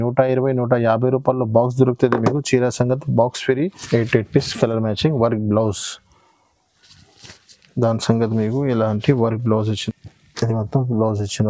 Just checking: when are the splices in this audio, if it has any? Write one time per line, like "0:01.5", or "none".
0:03.8
0:09.8